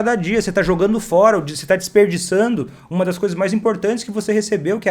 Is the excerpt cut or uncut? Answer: uncut